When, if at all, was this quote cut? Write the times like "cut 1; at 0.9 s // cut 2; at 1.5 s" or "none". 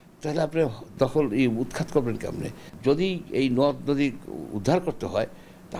cut 1; at 2.6 s